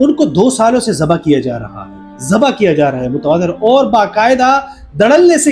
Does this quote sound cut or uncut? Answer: uncut